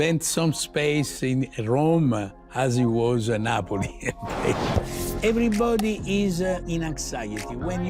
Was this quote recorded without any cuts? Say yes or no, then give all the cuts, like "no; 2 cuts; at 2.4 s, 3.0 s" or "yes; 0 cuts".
no; 2 cuts; at 4.9 s, 6.6 s